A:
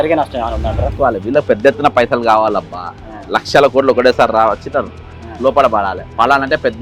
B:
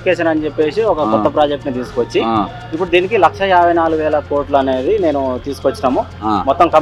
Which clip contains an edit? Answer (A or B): A